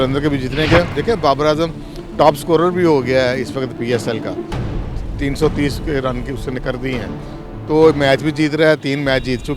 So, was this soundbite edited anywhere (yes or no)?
yes